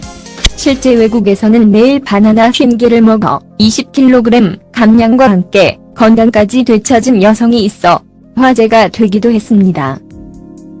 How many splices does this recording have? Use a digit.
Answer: 1